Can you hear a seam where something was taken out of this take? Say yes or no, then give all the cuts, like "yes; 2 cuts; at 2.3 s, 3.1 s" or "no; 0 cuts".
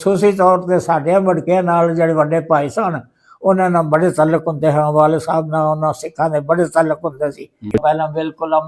yes; 1 cut; at 7.7 s